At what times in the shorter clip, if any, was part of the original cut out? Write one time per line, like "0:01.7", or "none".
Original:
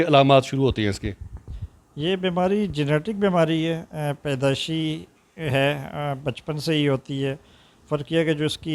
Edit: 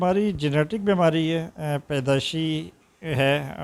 none